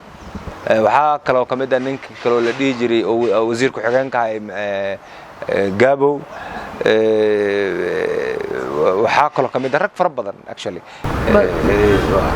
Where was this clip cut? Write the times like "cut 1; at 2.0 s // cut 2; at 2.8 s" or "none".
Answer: none